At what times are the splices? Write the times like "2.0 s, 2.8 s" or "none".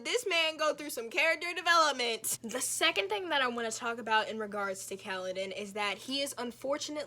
2.3 s